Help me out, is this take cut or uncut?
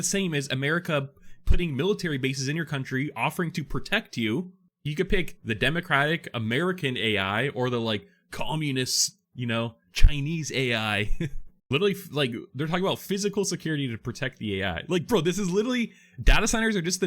cut